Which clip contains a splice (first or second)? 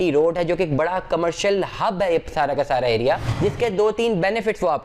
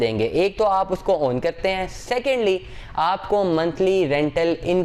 first